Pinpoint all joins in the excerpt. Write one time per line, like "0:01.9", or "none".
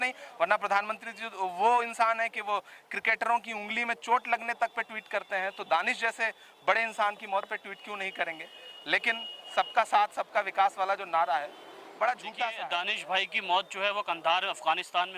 0:12.6